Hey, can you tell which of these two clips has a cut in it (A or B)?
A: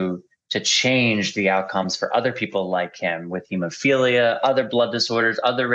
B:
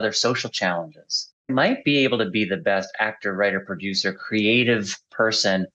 B